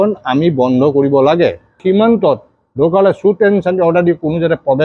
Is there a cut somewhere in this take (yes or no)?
yes